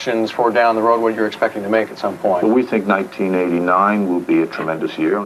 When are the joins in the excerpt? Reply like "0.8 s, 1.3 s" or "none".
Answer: none